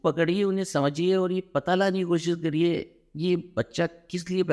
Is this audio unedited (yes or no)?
yes